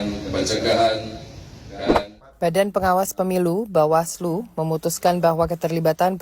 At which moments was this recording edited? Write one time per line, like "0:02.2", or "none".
0:01.7

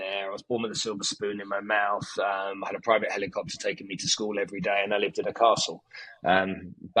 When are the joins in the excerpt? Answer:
none

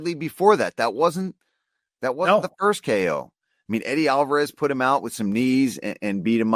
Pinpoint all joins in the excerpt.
none

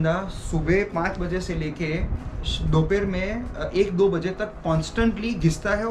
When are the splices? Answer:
none

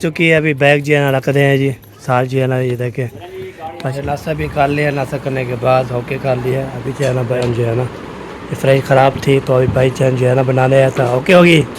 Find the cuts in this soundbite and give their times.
0:03.9
0:07.4

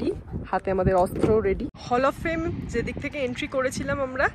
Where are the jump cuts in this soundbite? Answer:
0:01.7

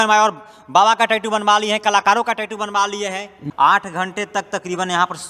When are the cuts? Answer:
0:03.4

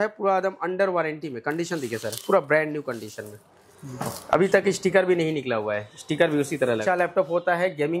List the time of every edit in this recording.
0:06.8

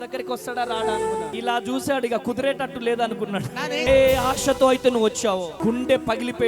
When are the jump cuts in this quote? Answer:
0:01.3
0:03.8
0:05.6

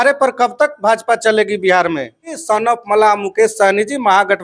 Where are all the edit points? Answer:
0:02.4

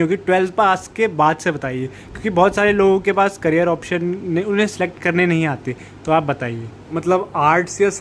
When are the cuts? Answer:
0:06.9

